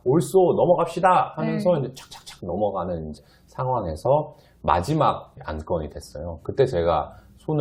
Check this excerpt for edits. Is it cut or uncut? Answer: cut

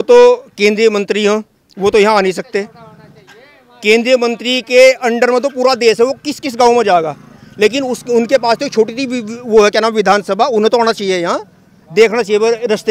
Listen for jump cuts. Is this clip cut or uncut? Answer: uncut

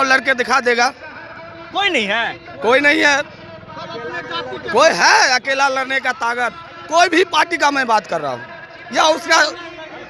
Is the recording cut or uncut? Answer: uncut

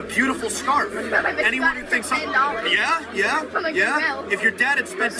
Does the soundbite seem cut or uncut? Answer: uncut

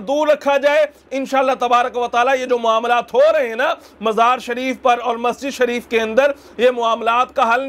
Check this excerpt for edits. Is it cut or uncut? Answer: uncut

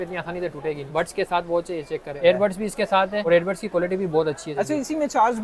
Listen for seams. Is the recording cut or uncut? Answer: cut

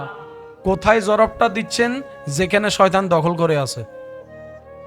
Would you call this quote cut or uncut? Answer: cut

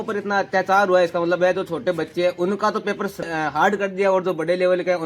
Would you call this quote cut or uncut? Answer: cut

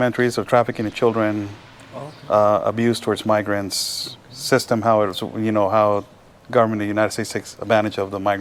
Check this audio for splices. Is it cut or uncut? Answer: uncut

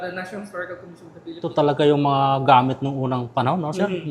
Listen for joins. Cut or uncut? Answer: cut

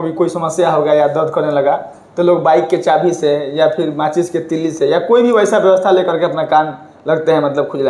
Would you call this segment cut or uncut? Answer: uncut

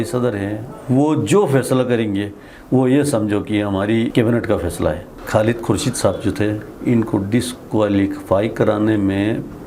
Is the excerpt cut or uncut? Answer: cut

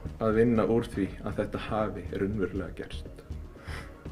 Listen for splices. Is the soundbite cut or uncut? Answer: cut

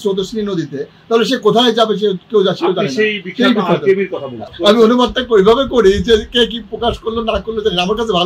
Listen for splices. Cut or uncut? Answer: cut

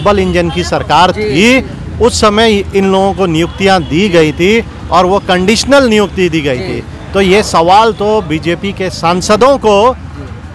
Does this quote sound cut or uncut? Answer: uncut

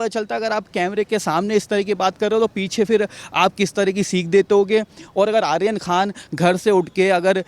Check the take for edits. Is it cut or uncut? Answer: uncut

